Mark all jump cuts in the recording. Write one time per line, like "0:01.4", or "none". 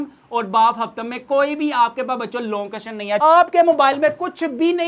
0:03.2